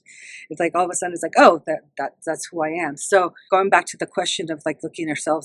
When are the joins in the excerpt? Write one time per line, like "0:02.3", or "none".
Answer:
0:03.4